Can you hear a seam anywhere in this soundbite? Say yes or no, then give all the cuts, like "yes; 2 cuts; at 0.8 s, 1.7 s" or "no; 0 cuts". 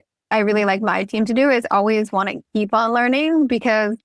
no; 0 cuts